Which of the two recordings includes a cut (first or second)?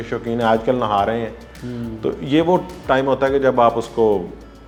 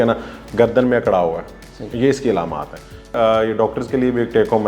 second